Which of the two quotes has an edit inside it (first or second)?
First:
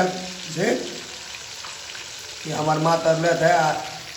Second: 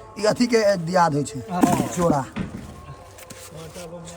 second